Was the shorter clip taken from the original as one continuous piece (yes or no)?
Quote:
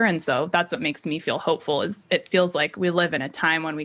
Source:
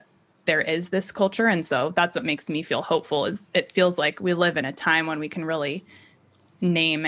yes